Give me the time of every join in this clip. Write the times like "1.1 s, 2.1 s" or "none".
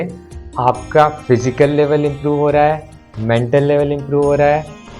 none